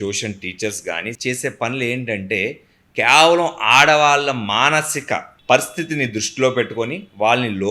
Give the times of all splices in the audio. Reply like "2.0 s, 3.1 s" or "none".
1.1 s